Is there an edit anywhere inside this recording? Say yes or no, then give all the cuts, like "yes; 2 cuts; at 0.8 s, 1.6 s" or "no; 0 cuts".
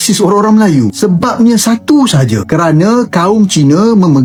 no; 0 cuts